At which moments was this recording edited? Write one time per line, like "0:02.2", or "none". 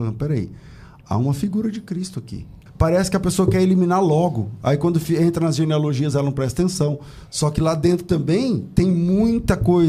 0:02.6